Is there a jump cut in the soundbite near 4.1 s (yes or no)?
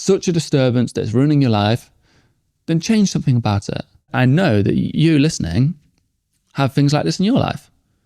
yes